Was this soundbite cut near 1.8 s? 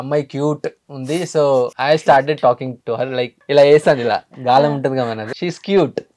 yes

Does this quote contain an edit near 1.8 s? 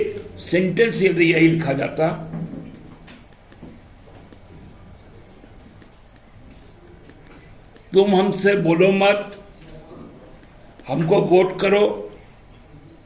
no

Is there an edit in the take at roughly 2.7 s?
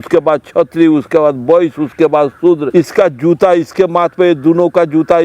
yes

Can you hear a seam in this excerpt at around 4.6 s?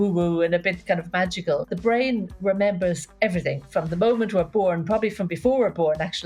no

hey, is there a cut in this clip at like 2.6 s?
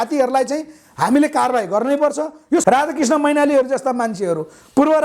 yes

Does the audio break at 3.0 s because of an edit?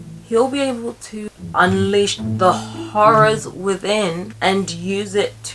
no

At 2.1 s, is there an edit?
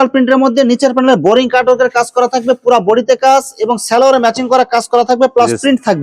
no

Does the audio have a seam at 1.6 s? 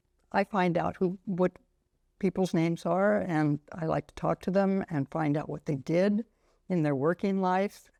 no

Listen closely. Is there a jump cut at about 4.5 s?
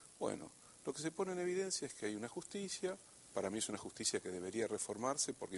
yes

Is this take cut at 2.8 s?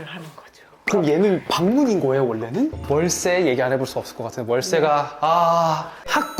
yes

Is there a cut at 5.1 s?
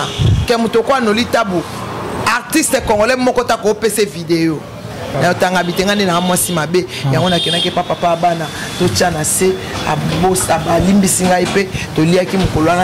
yes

